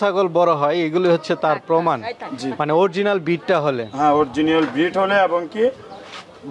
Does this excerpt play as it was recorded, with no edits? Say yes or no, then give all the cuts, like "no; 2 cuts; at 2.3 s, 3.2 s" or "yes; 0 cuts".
yes; 0 cuts